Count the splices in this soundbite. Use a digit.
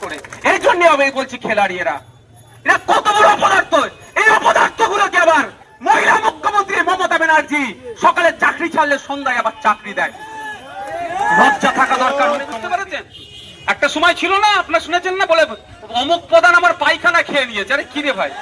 1